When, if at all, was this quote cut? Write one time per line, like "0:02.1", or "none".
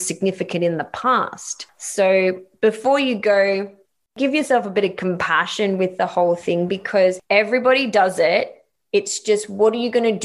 0:04.1